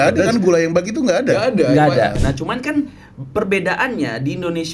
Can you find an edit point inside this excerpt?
yes; 1 cut; at 2.2 s

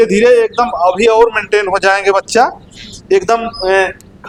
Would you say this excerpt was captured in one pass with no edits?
yes; 0 cuts

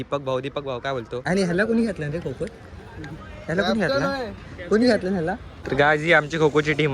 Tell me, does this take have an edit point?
yes; 2 cuts; at 1.2 s, 5.6 s

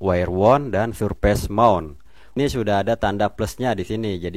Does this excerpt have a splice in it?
yes; 1 cut; at 2.3 s

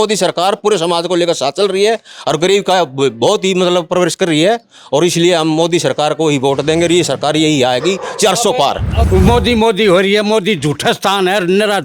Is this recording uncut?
no; 1 cut; at 8.9 s

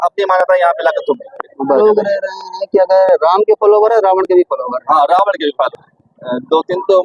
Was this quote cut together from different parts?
yes; 2 cuts; at 1.8 s, 5.9 s

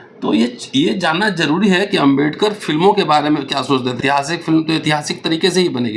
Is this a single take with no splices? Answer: no; 1 cut; at 4.0 s

